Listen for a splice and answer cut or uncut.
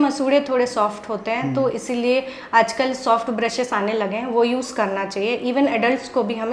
uncut